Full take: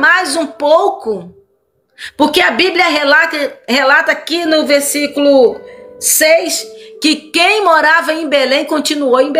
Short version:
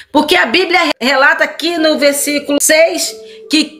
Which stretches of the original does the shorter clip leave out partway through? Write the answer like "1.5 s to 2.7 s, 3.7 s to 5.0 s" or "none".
3.0 s to 3.6 s, 5.3 s to 6.1 s